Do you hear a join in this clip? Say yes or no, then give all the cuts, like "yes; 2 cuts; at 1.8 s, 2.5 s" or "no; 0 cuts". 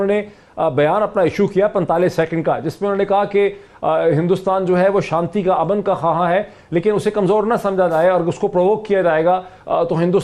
no; 0 cuts